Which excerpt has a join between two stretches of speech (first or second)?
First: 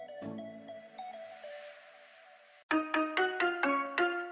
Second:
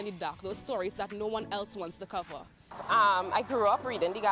first